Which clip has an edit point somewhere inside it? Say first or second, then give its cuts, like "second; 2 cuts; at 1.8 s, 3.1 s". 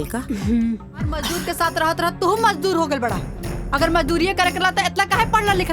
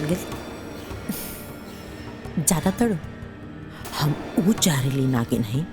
first; 1 cut; at 1.3 s